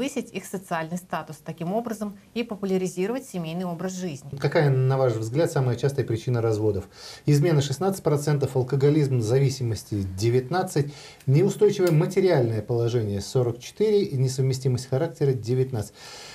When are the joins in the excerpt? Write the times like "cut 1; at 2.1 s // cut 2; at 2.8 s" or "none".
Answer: cut 1; at 4.3 s